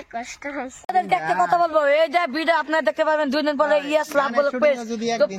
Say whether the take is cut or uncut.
cut